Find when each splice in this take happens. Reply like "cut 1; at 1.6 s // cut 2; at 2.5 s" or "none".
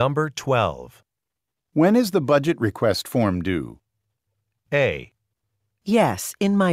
cut 1; at 4.1 s